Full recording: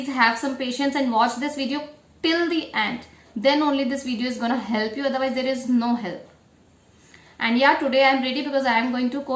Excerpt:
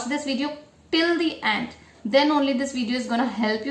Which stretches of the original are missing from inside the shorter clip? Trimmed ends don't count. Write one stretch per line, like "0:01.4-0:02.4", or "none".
none